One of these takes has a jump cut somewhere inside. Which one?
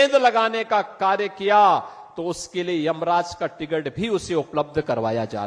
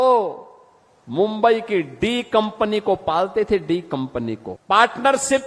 second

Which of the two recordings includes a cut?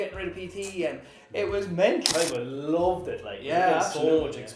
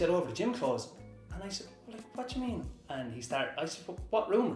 first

